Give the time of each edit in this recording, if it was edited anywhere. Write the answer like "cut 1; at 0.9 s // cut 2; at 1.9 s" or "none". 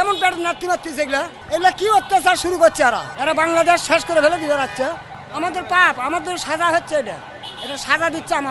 cut 1; at 1.4 s // cut 2; at 3.1 s // cut 3; at 5.1 s